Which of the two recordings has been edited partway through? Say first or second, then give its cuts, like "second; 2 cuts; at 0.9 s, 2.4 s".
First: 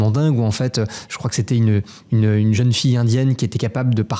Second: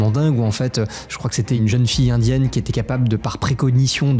second; 1 cut; at 1.6 s